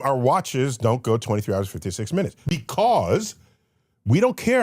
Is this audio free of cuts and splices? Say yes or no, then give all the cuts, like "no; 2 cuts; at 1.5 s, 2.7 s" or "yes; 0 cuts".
no; 1 cut; at 2.4 s